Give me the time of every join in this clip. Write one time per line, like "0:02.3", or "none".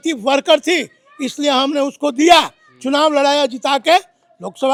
none